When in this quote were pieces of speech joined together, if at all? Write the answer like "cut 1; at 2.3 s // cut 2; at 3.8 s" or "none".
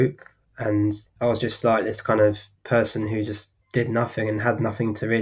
cut 1; at 1.1 s // cut 2; at 2.5 s // cut 3; at 3.5 s